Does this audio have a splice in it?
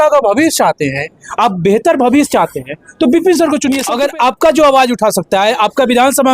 yes; 1 cut; at 3.9 s

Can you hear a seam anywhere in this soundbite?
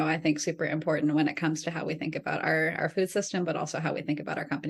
no; 0 cuts

